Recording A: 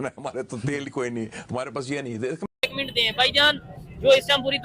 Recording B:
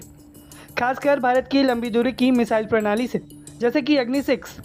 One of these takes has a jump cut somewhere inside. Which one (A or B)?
A